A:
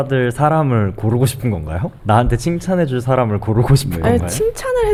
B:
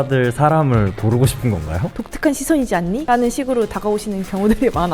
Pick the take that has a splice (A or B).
B